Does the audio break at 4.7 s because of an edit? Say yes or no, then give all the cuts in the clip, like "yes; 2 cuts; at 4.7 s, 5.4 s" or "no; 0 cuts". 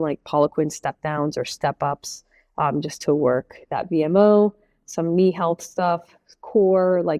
no; 0 cuts